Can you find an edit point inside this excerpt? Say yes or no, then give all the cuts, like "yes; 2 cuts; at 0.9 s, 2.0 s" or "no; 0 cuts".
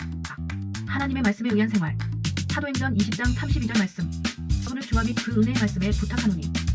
yes; 1 cut; at 4.7 s